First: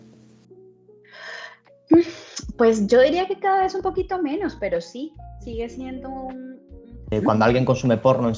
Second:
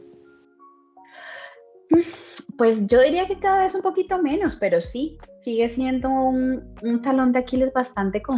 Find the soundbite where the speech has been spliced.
first; 1 cut; at 7.1 s

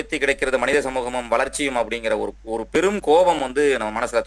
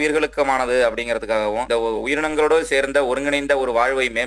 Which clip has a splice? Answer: second; 1 cut; at 1.6 s

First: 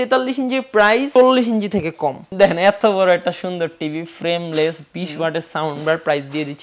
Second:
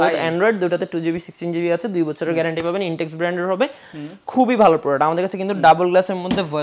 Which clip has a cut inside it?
first; 2 cuts; at 1.1 s, 2.2 s

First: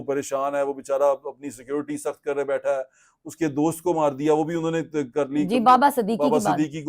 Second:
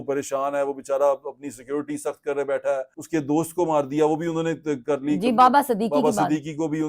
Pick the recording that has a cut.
second; 1 cut; at 2.9 s

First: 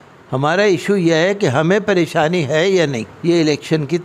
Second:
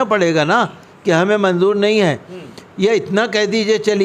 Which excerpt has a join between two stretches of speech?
first; 1 cut; at 3.1 s

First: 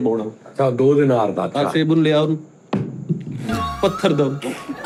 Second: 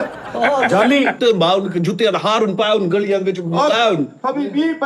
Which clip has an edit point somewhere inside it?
second; 1 cut; at 1.2 s

